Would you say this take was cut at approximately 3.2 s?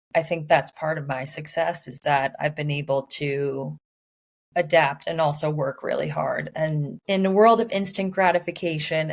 no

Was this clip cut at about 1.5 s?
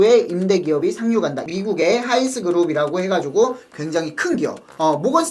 yes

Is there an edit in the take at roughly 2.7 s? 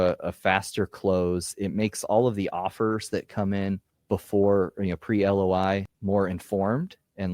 no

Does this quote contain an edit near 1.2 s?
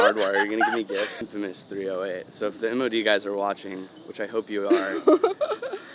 yes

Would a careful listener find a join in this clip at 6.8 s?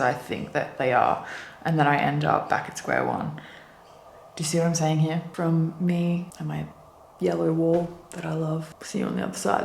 yes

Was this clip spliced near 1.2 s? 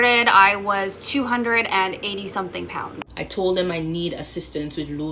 no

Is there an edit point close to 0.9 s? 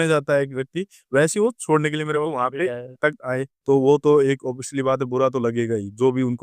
no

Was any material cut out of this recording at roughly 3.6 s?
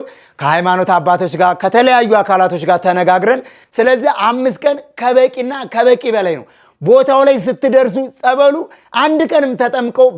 yes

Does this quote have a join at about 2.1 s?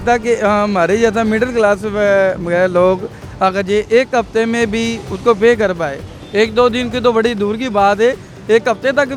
no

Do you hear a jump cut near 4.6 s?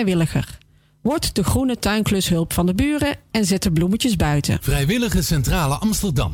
yes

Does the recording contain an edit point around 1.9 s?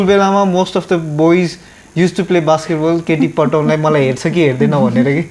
no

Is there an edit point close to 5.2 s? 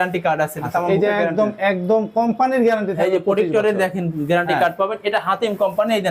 no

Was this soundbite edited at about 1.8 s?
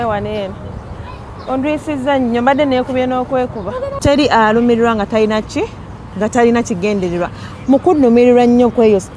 no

